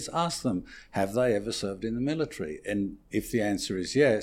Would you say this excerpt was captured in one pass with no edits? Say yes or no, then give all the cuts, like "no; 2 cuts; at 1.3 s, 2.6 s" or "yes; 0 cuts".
yes; 0 cuts